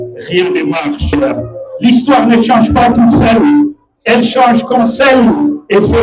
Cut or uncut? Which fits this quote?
cut